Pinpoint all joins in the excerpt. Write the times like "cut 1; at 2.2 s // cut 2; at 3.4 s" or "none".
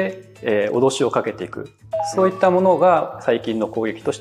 none